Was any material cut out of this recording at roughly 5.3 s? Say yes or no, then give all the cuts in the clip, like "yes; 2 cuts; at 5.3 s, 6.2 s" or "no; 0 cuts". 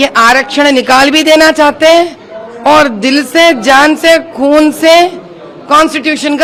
no; 0 cuts